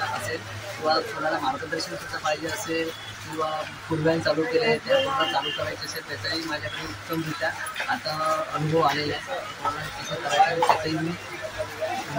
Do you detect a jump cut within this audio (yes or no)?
no